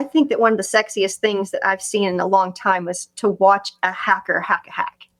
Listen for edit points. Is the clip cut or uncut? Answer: uncut